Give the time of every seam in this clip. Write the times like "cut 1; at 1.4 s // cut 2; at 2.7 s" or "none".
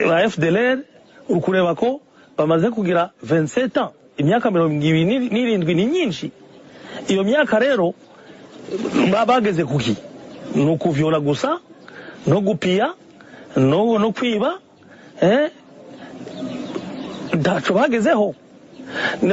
none